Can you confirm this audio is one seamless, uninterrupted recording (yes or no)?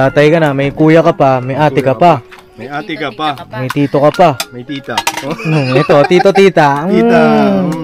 yes